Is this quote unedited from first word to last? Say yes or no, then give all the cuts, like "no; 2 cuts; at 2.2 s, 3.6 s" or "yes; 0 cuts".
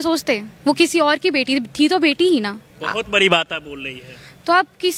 yes; 0 cuts